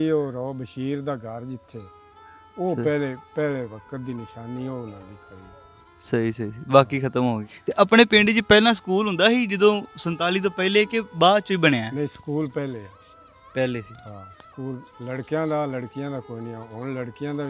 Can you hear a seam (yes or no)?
no